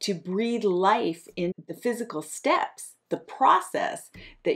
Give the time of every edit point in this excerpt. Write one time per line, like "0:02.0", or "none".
0:01.6